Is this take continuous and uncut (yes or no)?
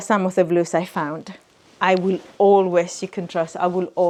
yes